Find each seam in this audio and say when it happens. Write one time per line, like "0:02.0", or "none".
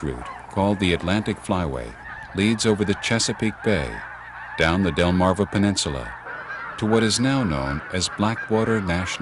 0:05.4